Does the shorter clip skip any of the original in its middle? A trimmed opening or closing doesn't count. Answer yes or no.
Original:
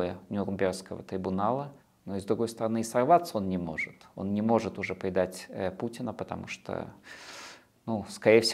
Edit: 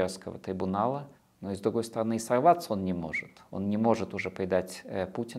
no